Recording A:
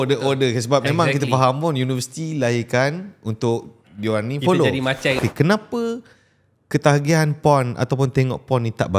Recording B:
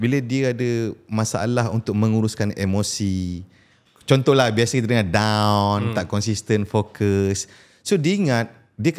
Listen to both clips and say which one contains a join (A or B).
A